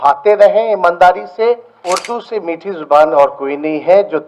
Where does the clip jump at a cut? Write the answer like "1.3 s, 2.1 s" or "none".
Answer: 1.7 s